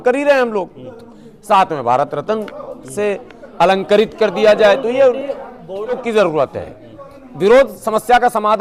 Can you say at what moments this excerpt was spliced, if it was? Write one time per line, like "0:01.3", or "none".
0:06.0